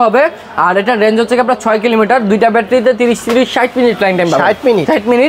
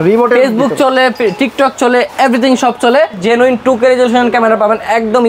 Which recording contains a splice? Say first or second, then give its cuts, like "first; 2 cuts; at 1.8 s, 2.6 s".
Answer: second; 1 cut; at 3.2 s